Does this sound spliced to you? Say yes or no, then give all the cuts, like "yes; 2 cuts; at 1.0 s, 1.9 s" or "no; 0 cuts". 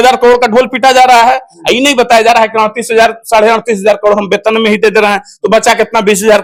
no; 0 cuts